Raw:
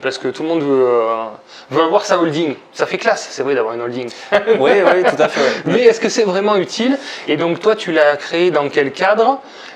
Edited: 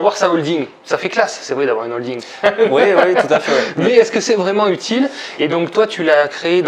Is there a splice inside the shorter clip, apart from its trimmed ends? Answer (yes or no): no